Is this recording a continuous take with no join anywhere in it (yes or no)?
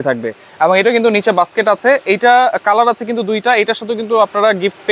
yes